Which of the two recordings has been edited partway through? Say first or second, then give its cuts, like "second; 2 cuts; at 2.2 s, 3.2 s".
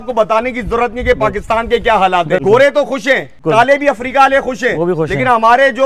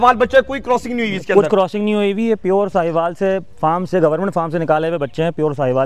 first; 2 cuts; at 2.4 s, 3.3 s